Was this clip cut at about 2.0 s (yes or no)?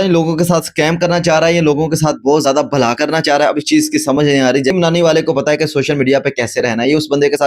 no